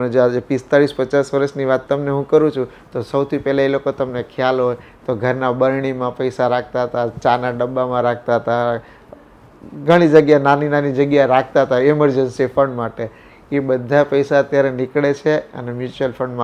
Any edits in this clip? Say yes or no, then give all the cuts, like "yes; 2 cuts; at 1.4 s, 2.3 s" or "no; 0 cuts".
no; 0 cuts